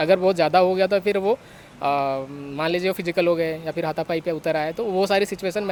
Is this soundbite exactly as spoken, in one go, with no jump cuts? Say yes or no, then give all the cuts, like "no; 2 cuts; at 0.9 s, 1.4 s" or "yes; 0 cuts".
yes; 0 cuts